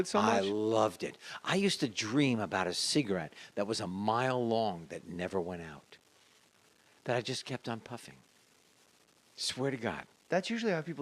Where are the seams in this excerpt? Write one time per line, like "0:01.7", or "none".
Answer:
0:05.9